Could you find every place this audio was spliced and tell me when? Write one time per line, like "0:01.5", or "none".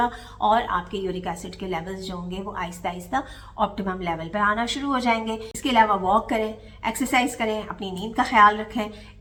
none